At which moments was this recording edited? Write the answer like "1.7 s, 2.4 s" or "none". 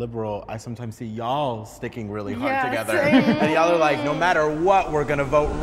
none